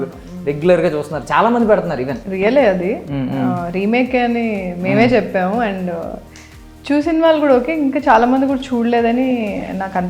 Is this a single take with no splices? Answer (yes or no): no